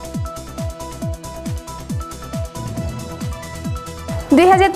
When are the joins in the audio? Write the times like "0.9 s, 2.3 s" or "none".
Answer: none